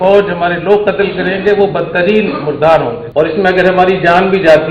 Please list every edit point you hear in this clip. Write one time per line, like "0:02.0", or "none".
0:03.0

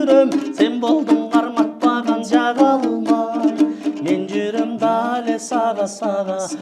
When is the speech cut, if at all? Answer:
none

